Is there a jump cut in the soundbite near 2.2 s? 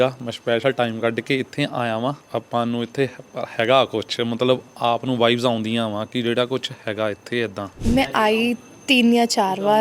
yes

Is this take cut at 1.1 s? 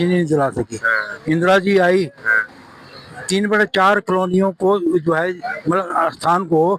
no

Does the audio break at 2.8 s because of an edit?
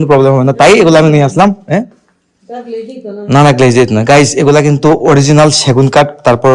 no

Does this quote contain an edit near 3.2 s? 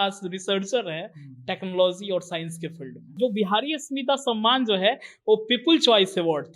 yes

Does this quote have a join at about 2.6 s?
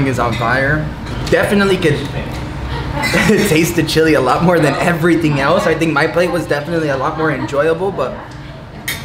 no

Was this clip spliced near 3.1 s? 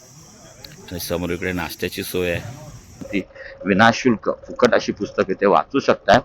yes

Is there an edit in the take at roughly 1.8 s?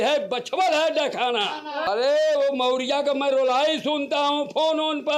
yes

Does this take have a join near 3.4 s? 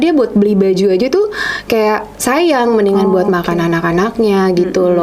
no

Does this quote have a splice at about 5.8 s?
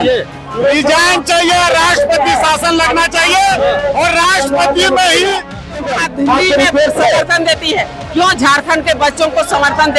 yes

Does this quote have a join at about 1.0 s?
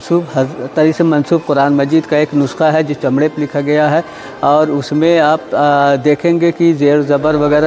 no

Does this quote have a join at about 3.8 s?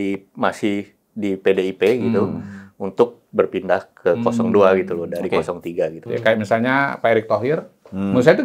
no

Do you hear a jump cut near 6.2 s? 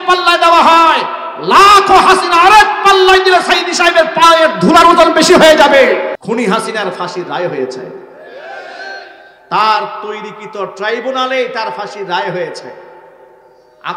yes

